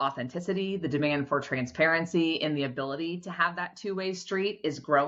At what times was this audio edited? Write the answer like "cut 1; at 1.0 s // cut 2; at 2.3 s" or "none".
none